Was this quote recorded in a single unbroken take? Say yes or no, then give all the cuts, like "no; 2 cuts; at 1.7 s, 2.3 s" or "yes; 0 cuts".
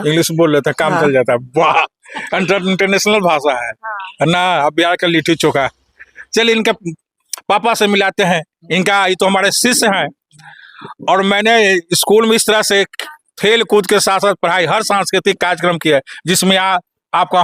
yes; 0 cuts